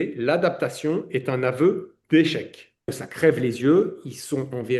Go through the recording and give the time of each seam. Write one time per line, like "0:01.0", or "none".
0:03.0